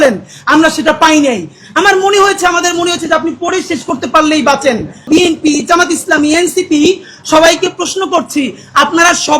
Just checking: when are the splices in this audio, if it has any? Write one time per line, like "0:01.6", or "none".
0:05.0

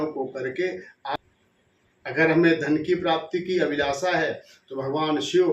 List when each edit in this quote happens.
0:01.2

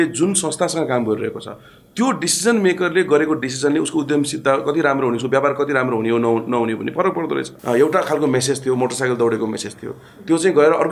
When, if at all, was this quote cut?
0:07.5

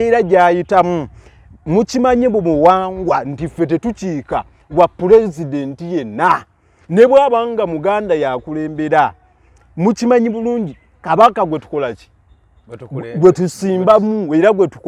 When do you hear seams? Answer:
none

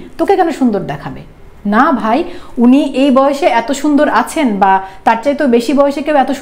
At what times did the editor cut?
none

